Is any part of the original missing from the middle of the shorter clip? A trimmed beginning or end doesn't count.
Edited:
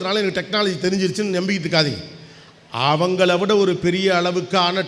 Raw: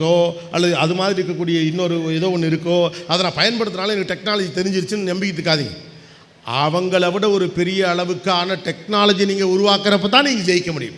no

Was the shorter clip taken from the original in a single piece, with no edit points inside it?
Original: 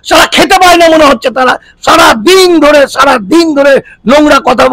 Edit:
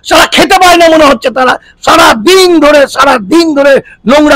yes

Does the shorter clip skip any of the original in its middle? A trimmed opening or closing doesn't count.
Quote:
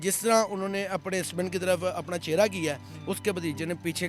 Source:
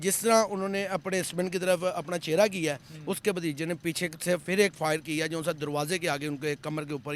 no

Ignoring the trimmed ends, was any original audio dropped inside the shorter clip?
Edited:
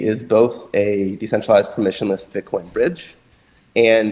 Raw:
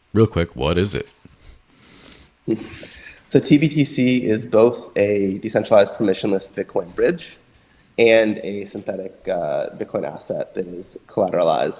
no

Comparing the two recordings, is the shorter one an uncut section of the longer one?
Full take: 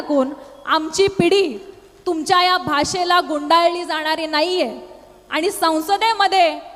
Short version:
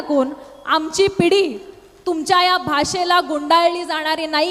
yes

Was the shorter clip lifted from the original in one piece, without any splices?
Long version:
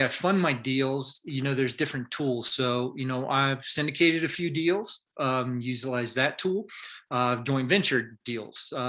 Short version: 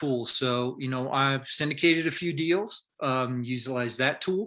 yes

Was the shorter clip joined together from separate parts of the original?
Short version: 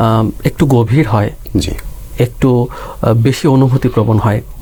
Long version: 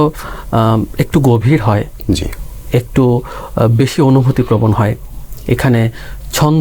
no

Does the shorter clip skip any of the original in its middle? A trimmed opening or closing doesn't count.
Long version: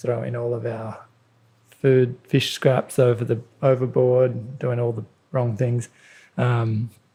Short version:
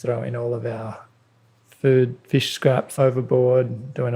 yes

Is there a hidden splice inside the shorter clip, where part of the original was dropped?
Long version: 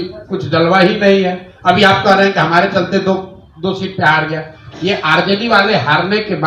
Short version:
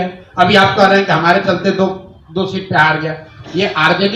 no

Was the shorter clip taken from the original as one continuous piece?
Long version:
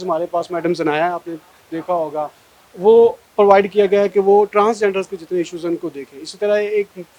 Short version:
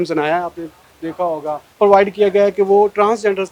no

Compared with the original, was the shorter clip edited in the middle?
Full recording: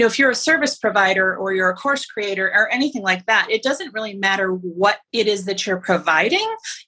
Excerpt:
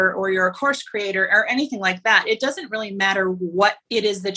no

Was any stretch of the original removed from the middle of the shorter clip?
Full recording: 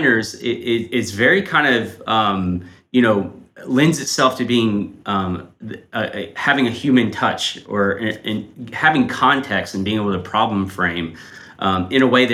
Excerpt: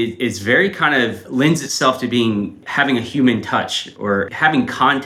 yes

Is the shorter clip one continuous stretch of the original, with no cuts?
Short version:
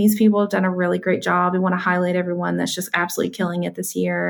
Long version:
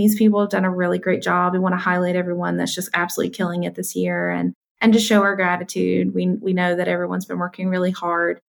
yes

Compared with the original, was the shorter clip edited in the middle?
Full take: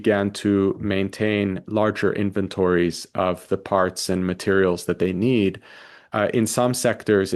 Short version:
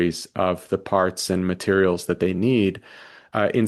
no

